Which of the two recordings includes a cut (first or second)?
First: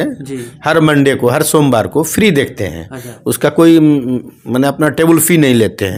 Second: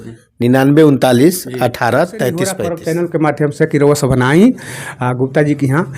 second